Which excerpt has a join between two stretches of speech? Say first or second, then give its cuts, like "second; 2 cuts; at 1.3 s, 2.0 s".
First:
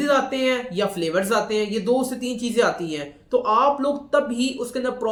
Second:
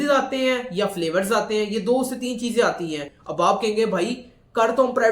second; 1 cut; at 3.1 s